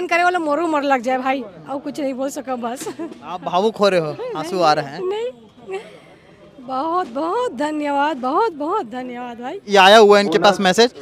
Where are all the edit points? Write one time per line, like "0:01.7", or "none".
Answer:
0:09.6